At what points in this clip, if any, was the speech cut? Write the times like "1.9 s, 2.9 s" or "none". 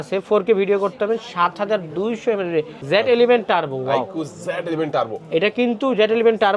2.8 s